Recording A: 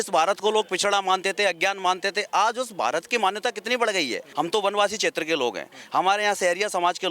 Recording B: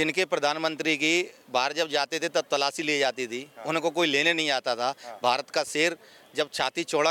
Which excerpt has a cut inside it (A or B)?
A